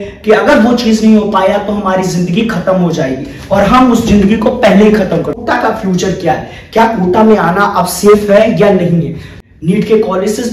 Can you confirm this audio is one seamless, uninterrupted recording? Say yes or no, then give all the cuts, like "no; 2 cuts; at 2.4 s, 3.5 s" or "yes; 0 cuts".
no; 2 cuts; at 5.4 s, 9.2 s